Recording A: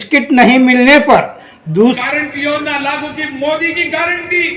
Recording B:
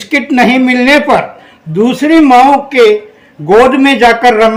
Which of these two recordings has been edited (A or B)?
A